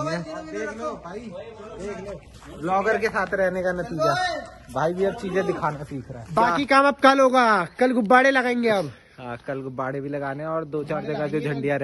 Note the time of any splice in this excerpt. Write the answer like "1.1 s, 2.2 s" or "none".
6.2 s